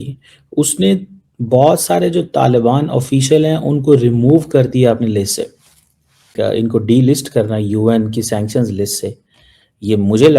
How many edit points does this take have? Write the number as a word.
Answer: one